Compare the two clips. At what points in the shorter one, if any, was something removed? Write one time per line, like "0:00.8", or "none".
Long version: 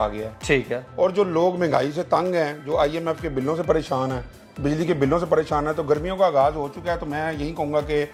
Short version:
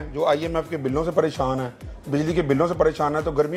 none

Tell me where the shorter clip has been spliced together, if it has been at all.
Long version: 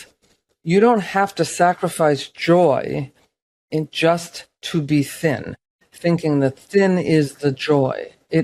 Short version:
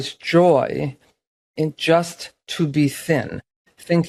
none

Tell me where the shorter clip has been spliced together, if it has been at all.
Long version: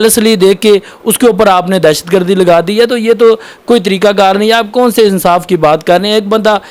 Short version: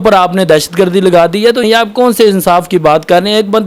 0:01.6

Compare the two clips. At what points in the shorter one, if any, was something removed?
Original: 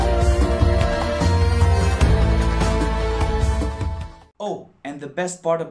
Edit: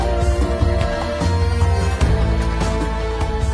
none

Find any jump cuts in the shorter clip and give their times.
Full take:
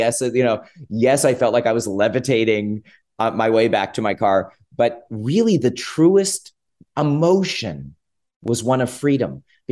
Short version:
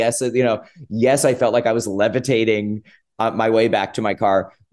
none

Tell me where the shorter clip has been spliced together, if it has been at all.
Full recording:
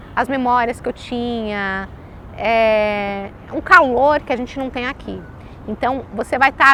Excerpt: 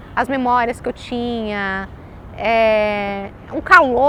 none

